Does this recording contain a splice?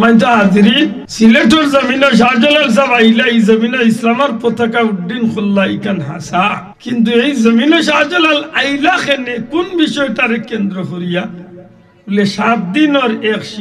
yes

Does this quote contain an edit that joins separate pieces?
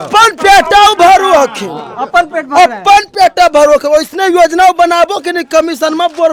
no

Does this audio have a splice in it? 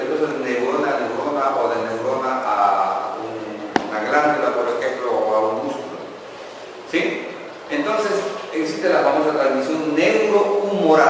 yes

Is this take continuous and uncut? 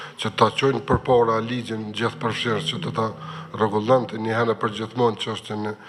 yes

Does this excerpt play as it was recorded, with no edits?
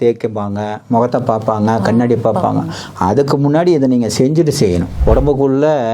no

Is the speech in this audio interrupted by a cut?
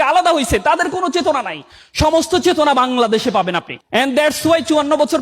yes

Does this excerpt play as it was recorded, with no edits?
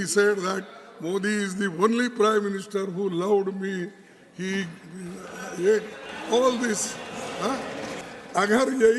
no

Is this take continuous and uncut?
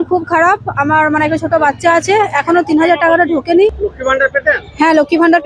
no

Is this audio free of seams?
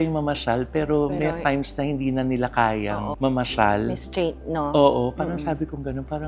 yes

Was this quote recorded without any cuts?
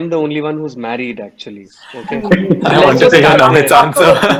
yes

